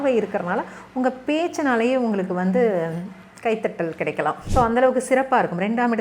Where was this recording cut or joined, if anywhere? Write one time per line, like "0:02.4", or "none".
0:04.4